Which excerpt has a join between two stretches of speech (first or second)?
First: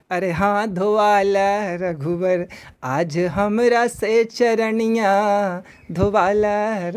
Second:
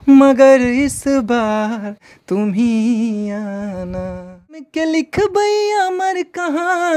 second